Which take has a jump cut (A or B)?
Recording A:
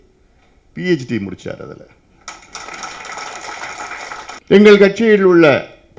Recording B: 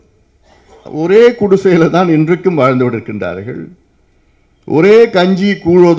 A